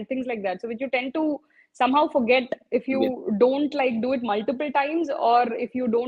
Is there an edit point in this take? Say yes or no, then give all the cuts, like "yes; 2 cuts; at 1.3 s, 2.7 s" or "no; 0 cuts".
no; 0 cuts